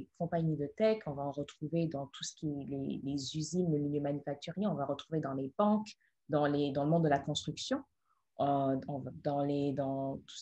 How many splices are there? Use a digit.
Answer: 0